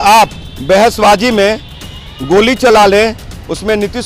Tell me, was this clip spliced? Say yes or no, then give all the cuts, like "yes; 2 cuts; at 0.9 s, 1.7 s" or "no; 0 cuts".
no; 0 cuts